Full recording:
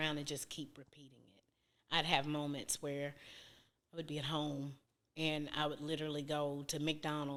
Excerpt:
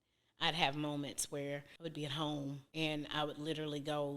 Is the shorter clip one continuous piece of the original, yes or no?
no